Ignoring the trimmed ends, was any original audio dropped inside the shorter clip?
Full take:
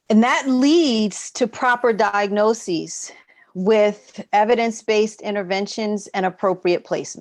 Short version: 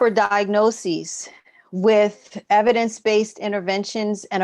no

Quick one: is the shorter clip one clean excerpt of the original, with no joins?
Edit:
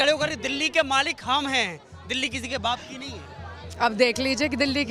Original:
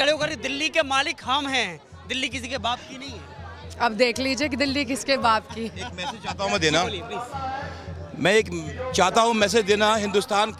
yes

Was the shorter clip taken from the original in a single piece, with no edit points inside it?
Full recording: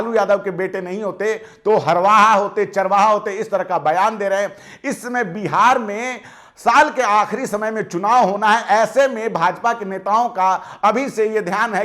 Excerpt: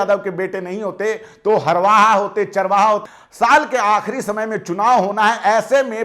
no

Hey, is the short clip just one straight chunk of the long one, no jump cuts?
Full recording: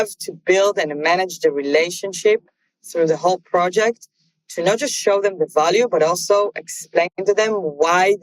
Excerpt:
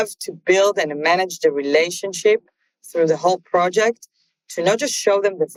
yes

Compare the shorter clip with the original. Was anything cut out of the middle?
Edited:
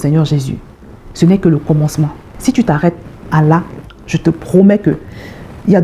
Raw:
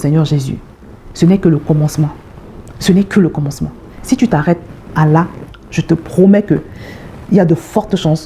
yes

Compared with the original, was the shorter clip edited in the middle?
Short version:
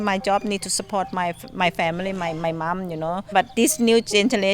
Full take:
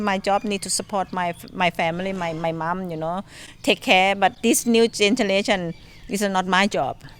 yes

